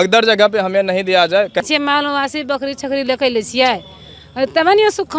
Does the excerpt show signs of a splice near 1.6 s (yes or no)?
yes